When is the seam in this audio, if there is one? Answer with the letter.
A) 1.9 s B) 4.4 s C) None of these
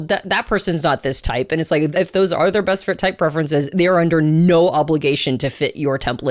A